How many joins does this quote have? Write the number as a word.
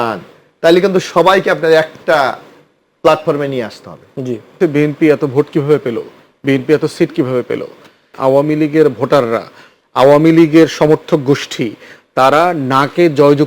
two